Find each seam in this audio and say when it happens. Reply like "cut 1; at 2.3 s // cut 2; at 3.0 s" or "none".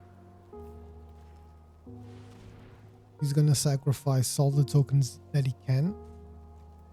cut 1; at 1.4 s // cut 2; at 2.6 s // cut 3; at 6.0 s